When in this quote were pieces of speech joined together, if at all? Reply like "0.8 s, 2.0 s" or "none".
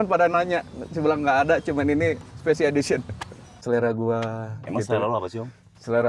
3.6 s